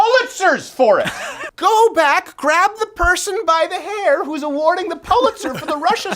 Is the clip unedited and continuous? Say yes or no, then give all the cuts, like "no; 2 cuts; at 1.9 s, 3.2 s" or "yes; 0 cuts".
no; 1 cut; at 1.4 s